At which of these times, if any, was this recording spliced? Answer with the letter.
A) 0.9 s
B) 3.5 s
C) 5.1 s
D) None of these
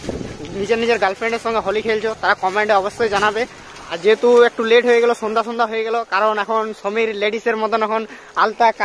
B